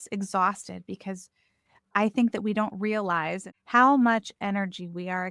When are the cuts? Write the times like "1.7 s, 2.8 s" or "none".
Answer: 3.4 s